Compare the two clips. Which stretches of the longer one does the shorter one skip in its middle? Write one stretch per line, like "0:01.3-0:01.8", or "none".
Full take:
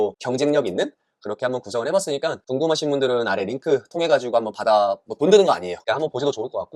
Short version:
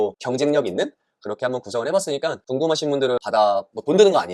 0:03.2-0:04.5